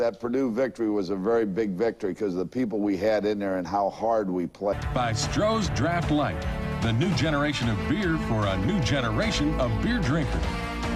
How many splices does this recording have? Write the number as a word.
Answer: zero